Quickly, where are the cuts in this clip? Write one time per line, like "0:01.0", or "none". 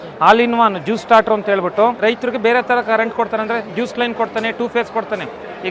0:02.0